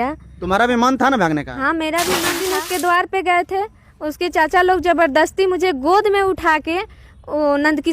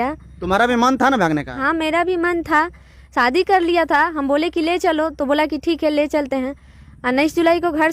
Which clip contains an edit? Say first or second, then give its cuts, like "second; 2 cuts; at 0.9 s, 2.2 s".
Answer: first; 1 cut; at 2.4 s